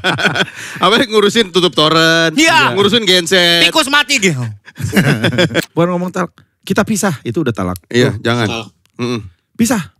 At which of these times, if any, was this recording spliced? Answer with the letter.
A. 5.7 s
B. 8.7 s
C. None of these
A